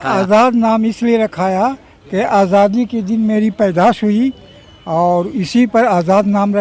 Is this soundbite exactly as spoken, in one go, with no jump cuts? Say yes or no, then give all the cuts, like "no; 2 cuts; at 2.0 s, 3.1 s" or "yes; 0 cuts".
yes; 0 cuts